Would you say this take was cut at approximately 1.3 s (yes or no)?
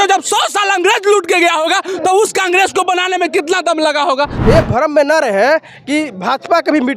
no